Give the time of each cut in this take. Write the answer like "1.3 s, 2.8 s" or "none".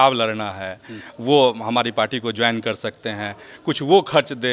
none